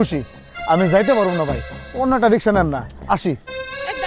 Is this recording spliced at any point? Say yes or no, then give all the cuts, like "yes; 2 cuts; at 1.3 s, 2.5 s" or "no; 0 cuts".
no; 0 cuts